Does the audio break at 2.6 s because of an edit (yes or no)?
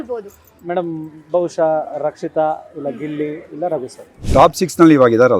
no